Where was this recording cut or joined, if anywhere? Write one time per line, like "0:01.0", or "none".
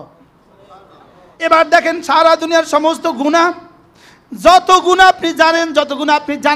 0:01.4